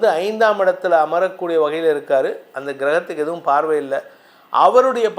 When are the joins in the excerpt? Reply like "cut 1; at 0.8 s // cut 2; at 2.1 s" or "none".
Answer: none

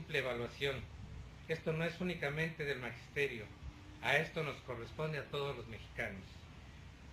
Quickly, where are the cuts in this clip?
none

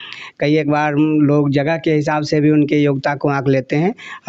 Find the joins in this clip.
none

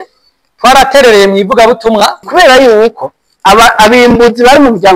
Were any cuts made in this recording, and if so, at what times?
cut 1; at 2.3 s

